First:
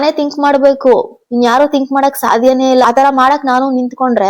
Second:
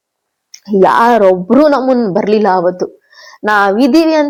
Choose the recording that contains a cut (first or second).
first